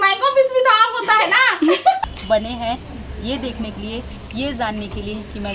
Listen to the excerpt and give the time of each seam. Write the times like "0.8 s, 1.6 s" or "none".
2.0 s